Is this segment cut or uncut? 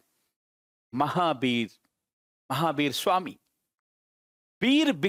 uncut